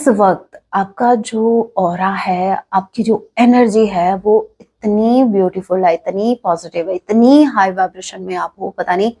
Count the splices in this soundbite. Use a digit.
0